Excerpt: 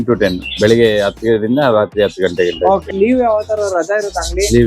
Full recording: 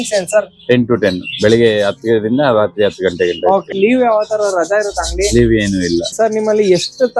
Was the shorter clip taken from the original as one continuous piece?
yes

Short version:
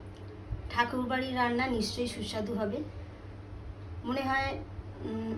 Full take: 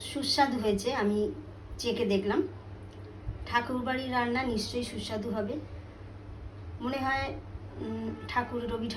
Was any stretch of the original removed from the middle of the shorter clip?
no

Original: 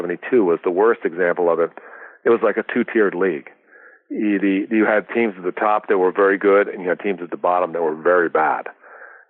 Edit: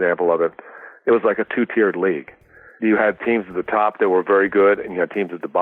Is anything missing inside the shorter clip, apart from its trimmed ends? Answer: yes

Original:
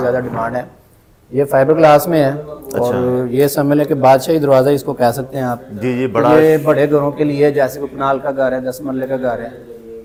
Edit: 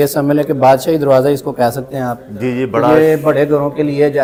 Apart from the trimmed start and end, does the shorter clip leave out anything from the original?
no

